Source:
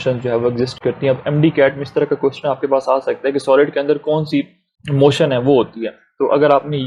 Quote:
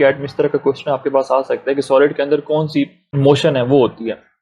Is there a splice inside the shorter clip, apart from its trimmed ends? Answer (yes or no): yes